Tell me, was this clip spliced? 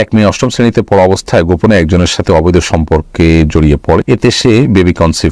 yes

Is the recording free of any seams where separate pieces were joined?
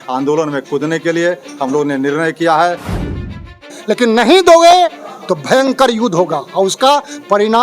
no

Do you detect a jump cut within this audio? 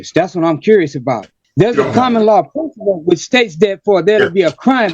yes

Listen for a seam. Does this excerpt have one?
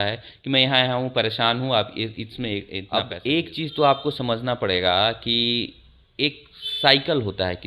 yes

